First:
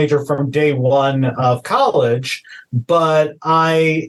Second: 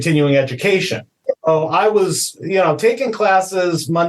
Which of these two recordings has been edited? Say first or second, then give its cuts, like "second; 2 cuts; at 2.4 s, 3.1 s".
second; 1 cut; at 1.2 s